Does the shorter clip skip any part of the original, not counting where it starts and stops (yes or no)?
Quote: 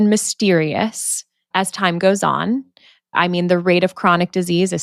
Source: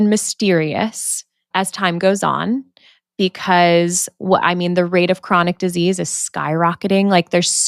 yes